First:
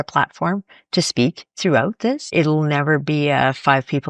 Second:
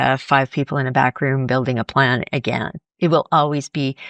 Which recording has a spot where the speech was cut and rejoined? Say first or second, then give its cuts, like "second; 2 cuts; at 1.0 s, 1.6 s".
first; 1 cut; at 2.3 s